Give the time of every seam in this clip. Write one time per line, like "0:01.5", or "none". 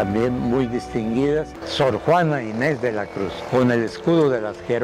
0:01.5